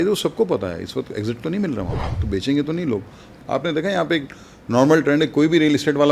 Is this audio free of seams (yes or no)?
no